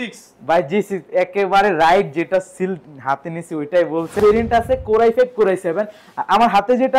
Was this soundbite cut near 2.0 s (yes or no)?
no